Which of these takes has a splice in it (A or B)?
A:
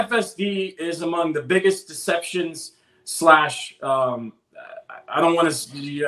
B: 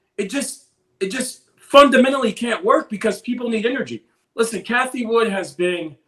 B